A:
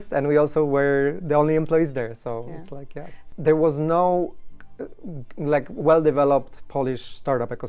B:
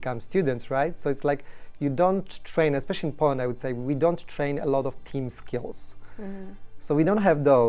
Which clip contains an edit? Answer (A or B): A